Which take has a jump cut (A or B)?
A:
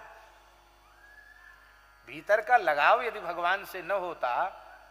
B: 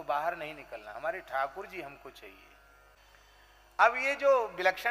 B